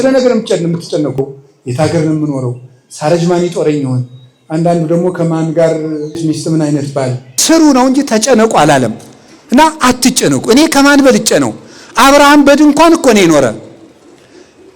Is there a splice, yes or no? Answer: yes